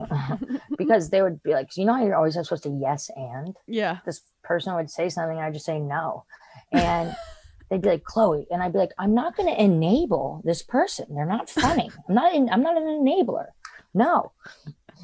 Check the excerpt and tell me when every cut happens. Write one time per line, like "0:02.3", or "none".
0:03.9

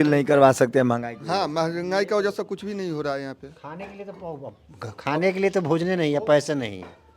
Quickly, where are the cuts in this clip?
none

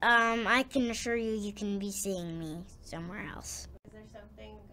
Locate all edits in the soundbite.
0:03.8

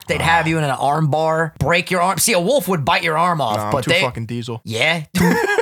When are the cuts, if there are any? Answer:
0:01.5
0:04.6

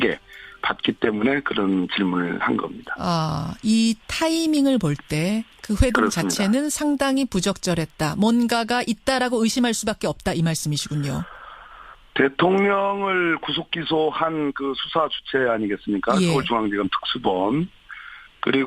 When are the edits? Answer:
none

